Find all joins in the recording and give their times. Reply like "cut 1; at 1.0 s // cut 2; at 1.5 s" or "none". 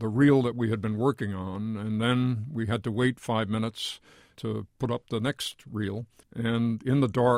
cut 1; at 4.4 s // cut 2; at 6.2 s